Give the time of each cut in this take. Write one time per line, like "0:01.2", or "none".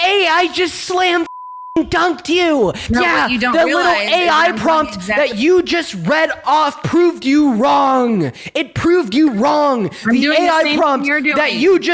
0:02.8